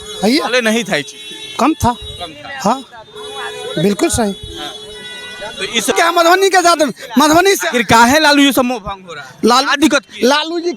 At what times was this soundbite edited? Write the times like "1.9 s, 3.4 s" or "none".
5.9 s